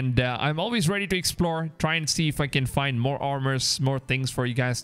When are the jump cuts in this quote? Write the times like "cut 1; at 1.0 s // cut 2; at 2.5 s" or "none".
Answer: none